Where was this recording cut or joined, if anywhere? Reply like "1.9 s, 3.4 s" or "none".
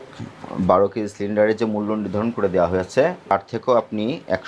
3.3 s